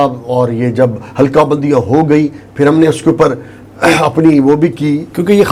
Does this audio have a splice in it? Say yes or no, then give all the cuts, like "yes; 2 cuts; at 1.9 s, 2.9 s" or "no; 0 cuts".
no; 0 cuts